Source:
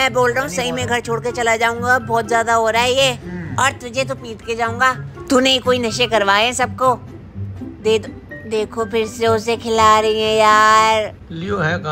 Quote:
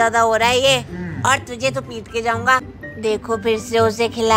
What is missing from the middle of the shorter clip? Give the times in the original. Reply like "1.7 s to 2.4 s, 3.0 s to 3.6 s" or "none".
5.1 s to 8.2 s

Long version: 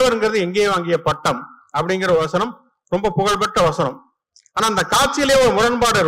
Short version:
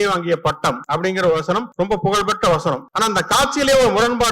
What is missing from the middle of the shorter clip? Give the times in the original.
1.4 s to 1.7 s, 2.5 s to 2.8 s, 4.0 s to 4.5 s

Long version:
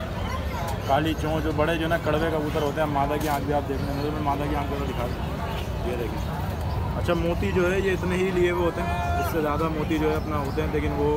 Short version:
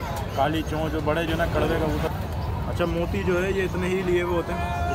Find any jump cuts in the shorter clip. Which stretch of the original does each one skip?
2.6 s to 6.3 s

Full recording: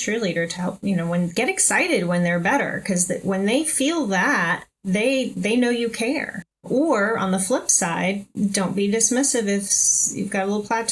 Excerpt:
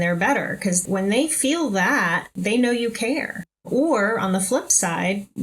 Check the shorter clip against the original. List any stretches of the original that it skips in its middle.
3.1 s to 3.2 s, 4.7 s to 5.3 s

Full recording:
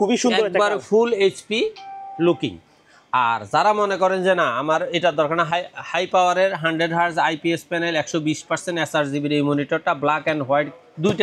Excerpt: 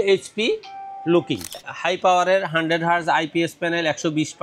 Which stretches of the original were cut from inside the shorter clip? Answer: 2.8 s to 5.8 s

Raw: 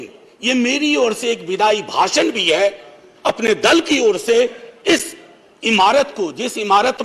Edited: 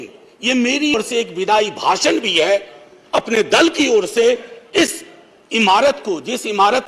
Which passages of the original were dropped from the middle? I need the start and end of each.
0.9 s to 1.1 s

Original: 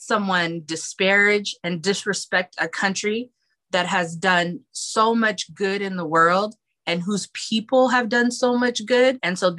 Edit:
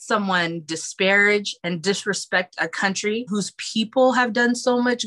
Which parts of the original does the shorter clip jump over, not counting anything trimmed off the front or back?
3.3 s to 7.0 s

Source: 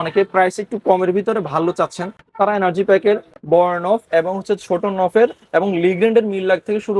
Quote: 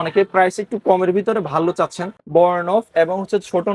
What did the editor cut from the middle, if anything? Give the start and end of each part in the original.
2.2 s to 3.3 s

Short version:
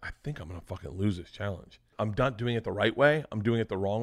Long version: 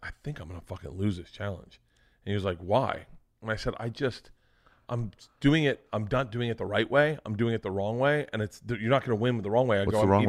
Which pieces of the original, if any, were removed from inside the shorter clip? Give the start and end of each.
1.9 s to 5.8 s

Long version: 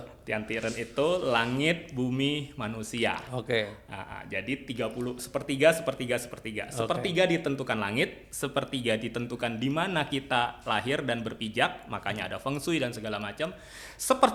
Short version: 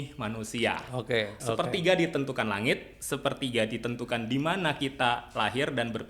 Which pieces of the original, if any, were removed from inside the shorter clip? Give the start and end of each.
3.7 s to 6.7 s

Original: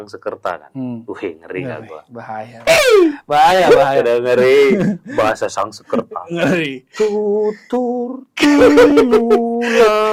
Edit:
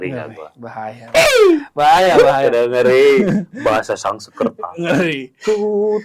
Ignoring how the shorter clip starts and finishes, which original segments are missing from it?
none

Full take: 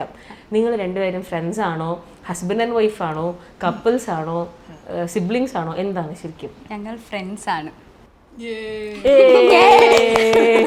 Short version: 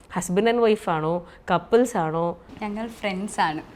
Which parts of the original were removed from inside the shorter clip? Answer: 4.6 s to 6.6 s

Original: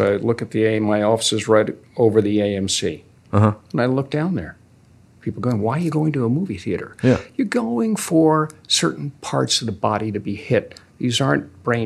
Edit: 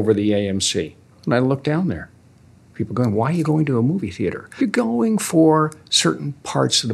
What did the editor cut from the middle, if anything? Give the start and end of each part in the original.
3.2 s to 3.6 s, 6.9 s to 7.2 s

